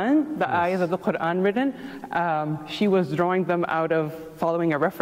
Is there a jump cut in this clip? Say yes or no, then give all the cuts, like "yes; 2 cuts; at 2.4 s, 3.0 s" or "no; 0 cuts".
no; 0 cuts